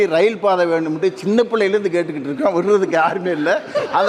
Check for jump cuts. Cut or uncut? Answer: uncut